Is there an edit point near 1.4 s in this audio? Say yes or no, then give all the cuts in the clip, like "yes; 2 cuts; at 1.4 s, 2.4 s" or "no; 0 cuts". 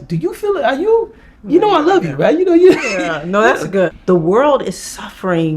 no; 1 cut; at 3.9 s